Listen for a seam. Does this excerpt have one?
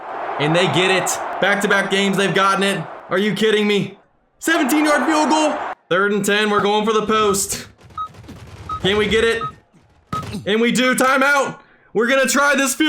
yes; 4 cuts; at 1.2 s, 2.9 s, 4.0 s, 5.7 s

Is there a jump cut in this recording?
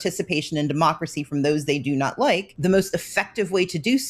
yes; 1 cut; at 2.5 s

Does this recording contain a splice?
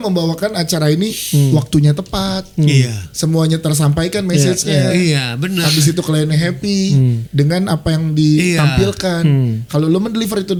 no; 0 cuts

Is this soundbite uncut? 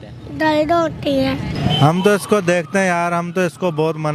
no; 1 cut; at 1.5 s

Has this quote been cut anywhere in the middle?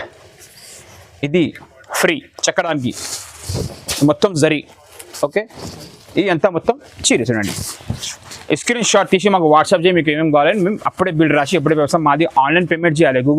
no; 0 cuts

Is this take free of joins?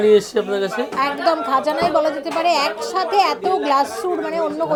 yes; 0 cuts

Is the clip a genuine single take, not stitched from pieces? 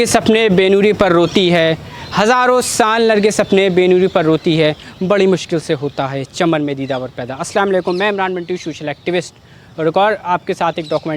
yes; 0 cuts

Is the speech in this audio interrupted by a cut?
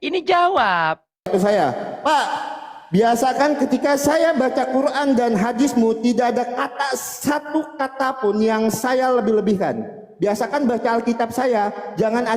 yes; 1 cut; at 1.3 s

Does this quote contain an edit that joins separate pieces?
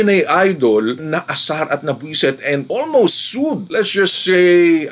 no; 0 cuts

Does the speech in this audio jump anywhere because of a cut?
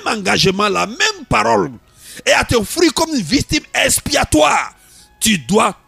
no; 0 cuts

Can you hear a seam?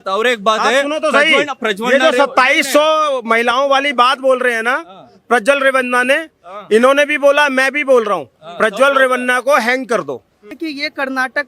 yes; 1 cut; at 10.5 s

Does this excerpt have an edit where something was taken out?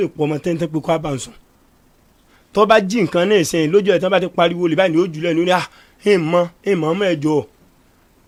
no; 0 cuts

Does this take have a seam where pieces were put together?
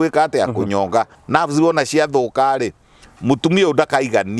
yes; 1 cut; at 1.2 s

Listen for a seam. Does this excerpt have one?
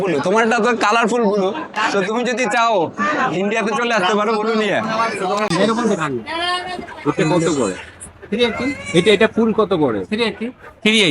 yes; 1 cut; at 5.5 s

